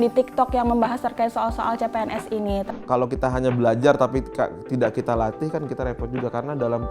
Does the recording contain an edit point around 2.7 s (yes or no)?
yes